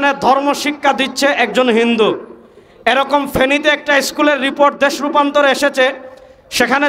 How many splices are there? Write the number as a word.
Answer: zero